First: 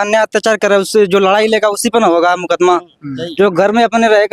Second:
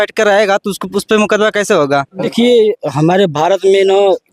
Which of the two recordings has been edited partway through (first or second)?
second